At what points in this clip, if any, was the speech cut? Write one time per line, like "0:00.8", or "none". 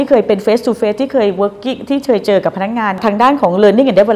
none